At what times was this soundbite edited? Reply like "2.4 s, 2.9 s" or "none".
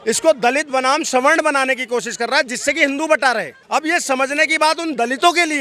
3.5 s